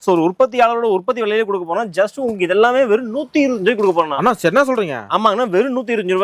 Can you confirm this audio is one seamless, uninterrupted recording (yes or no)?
yes